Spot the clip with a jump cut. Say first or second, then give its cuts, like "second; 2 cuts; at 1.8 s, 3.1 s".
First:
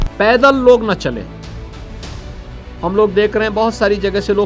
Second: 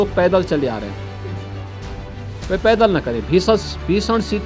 second; 2 cuts; at 1.0 s, 2.5 s